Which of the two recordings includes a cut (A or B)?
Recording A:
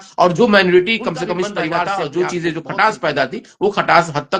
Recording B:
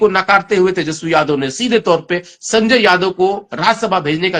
A